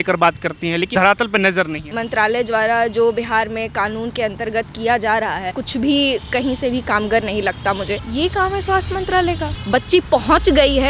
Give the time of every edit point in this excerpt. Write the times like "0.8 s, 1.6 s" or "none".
0.9 s, 1.9 s, 5.5 s, 8.1 s, 9.5 s